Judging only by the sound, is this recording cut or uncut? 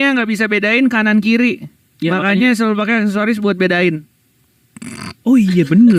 uncut